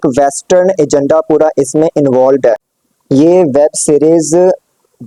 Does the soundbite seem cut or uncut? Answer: uncut